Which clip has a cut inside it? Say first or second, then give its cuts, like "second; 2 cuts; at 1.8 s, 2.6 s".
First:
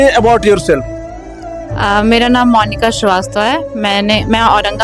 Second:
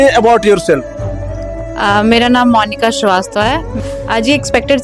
second; 1 cut; at 3.7 s